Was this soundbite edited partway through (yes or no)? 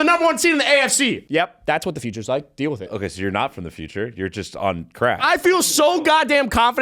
yes